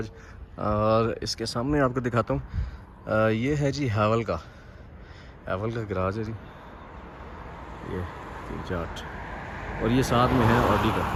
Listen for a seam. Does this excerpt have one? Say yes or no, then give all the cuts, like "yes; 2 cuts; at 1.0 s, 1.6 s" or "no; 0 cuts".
no; 0 cuts